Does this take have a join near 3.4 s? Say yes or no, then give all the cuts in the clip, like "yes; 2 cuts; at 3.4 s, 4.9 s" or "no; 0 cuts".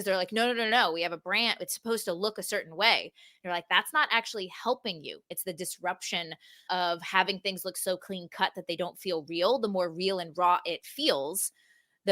no; 1 cut; at 5.3 s